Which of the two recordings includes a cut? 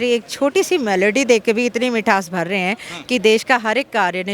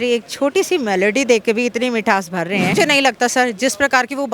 second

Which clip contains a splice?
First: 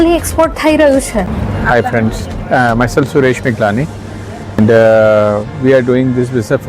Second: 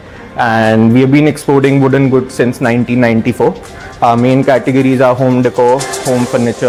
first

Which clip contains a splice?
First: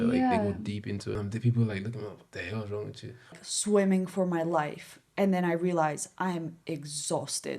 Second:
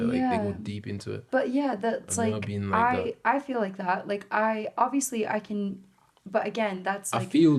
first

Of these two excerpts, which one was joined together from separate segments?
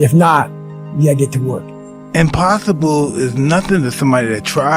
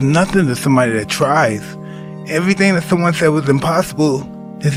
first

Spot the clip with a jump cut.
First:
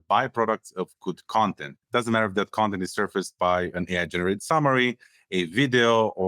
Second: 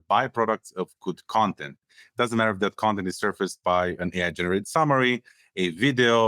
first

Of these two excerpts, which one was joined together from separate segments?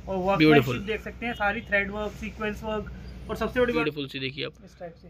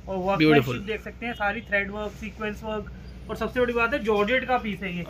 first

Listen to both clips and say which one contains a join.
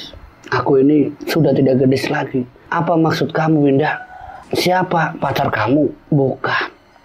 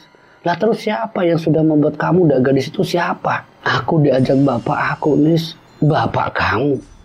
first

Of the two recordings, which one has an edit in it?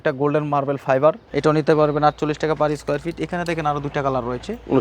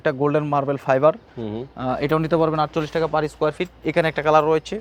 first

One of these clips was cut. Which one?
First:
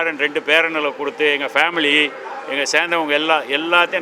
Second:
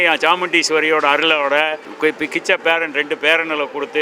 second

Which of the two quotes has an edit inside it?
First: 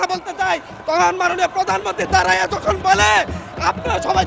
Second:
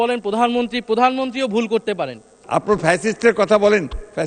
second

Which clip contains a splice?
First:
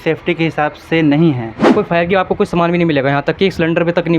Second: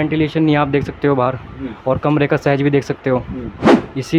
first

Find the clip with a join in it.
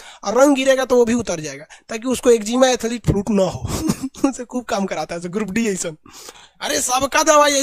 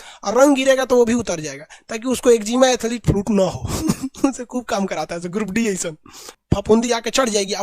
second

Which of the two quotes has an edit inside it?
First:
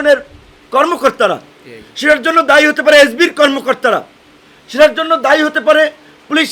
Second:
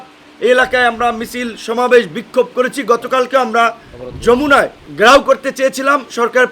second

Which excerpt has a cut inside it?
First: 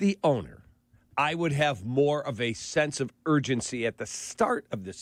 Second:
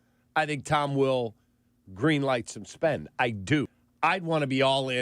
second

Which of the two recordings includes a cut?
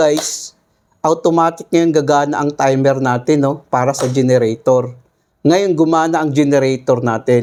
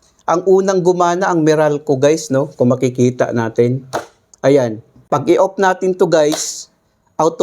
second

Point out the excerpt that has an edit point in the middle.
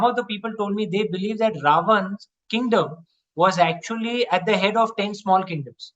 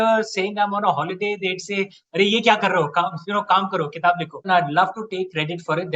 second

